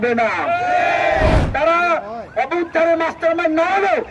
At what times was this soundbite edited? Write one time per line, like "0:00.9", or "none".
0:01.4

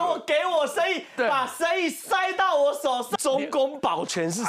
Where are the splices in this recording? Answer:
0:03.1

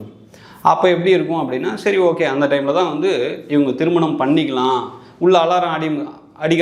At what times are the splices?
none

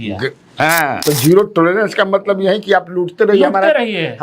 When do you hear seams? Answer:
0:01.0

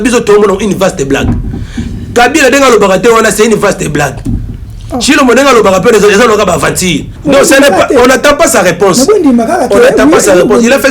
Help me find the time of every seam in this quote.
0:07.1

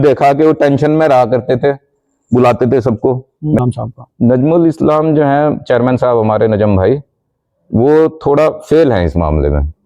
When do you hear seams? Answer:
0:03.6

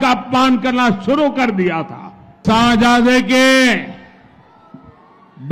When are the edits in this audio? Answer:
0:02.4

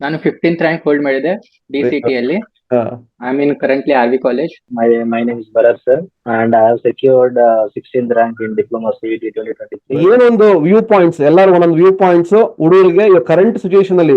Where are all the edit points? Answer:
0:03.1
0:04.7
0:06.1
0:09.8

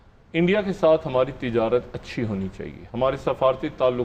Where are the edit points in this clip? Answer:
none

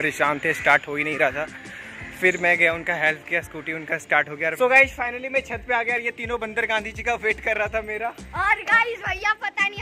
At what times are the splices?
0:04.6

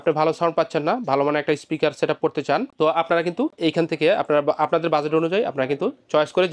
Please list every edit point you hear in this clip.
0:03.5

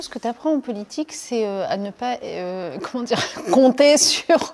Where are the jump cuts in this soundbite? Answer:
none

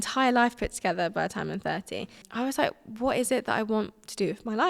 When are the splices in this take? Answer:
0:02.2

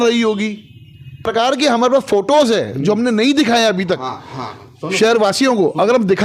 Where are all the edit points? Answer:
0:01.2

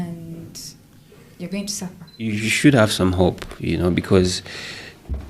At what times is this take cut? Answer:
0:02.2

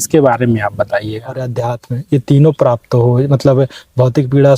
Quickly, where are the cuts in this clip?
0:01.5

